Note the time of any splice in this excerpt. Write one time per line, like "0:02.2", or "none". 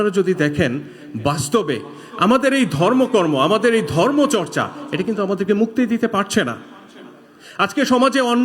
none